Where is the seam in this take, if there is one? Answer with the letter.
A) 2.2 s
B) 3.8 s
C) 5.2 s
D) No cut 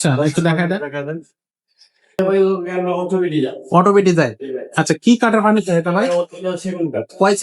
A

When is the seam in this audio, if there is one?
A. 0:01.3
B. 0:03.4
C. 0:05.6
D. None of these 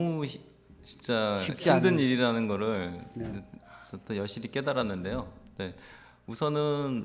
D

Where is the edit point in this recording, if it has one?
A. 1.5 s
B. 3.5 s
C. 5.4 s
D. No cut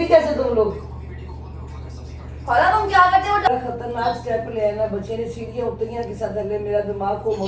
B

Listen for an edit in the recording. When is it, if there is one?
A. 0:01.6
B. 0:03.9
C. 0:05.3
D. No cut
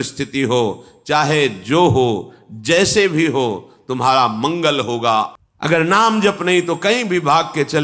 C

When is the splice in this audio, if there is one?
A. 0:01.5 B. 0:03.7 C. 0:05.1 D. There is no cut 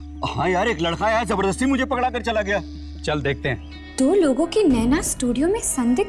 B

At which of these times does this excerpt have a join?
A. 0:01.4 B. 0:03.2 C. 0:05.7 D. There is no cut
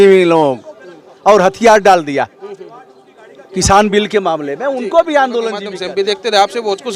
C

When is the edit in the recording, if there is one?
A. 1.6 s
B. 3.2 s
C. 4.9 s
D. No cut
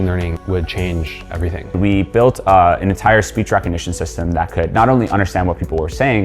A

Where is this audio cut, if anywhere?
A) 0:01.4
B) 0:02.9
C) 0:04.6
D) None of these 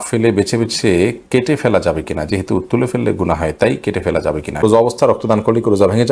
C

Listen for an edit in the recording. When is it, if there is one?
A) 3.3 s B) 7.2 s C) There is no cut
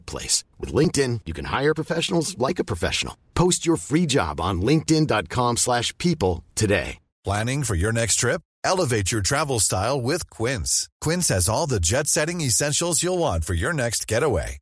B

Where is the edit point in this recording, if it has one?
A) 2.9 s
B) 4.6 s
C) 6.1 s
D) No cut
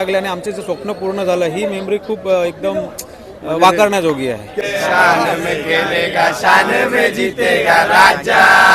B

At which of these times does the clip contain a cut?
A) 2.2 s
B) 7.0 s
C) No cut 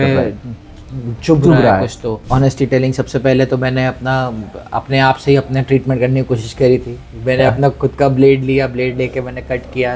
A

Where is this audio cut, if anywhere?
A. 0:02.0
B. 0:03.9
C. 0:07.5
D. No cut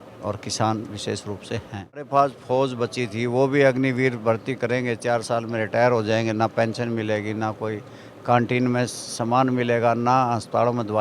A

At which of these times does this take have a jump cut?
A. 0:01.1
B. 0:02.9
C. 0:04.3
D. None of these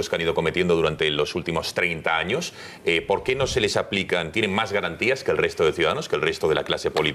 D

